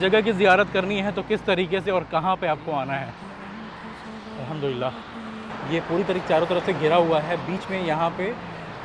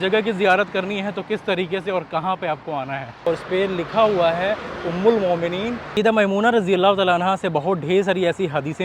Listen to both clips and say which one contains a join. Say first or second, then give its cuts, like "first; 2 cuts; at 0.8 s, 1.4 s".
second; 2 cuts; at 3.3 s, 5.8 s